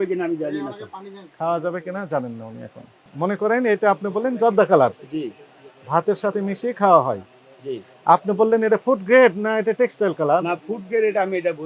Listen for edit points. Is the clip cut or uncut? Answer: uncut